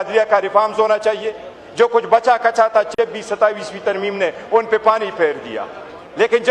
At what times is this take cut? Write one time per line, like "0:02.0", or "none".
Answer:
none